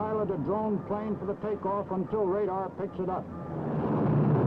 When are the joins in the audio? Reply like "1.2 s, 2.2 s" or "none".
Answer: none